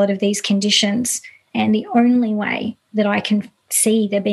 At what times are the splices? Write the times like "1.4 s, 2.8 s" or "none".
1.4 s